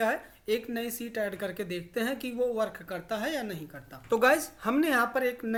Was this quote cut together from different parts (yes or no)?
no